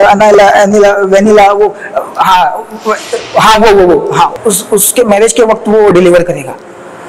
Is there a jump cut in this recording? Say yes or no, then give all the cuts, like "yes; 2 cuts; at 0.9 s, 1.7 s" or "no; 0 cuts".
yes; 1 cut; at 4.4 s